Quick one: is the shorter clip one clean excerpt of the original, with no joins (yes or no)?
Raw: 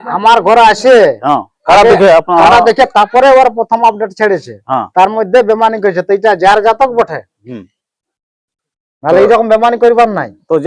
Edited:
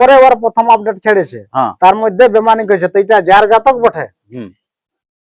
yes